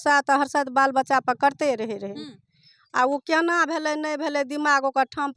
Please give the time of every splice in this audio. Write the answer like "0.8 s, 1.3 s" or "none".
none

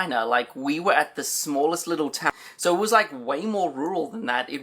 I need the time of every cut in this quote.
2.3 s

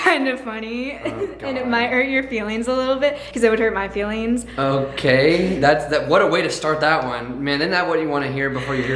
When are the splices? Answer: none

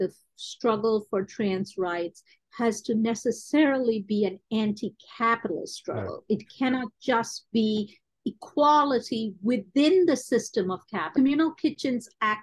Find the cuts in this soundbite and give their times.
11.1 s

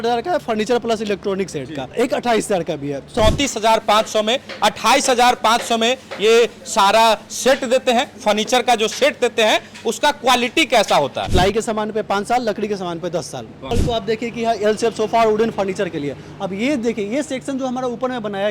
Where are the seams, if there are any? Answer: 1.9 s, 3.1 s, 11.2 s, 13.5 s

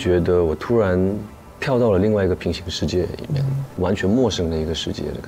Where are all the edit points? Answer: 3.8 s

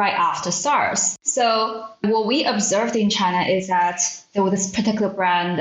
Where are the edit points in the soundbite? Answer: 1.1 s, 2.0 s

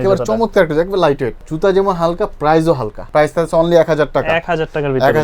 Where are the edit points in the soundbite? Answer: 1.4 s, 2.9 s

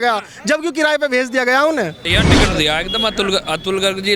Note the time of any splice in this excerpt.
2.1 s

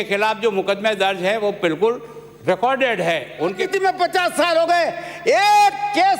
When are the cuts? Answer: 3.7 s

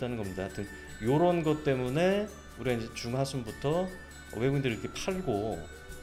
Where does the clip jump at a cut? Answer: none

